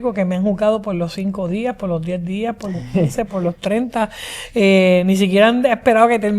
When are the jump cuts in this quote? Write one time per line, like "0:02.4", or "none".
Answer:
none